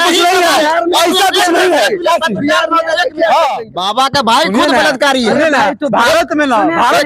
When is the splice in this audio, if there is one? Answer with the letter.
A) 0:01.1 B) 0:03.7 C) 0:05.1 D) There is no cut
B